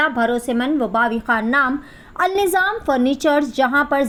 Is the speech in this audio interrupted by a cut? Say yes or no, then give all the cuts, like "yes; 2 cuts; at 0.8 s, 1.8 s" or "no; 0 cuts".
no; 0 cuts